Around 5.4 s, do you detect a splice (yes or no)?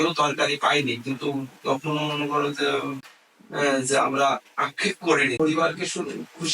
yes